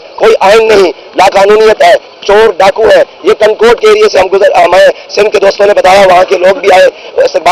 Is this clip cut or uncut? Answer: uncut